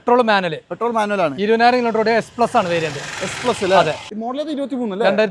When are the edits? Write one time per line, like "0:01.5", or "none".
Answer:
0:04.1